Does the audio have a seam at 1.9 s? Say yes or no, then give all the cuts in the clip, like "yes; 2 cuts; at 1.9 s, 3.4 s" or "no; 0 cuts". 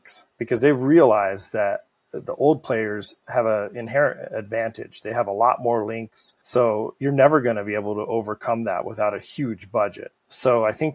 no; 0 cuts